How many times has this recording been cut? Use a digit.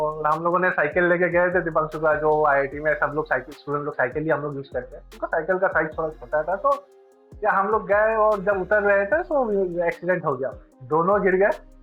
0